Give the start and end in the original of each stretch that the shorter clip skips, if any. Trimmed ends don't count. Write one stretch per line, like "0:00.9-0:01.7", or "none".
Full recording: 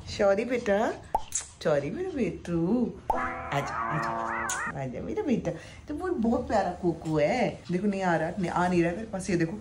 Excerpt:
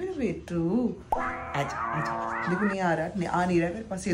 0:04.4-0:07.6